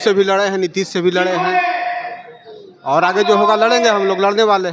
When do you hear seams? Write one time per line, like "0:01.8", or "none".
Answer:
none